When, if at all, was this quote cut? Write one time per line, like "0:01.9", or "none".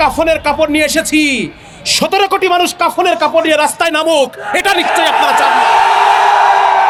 none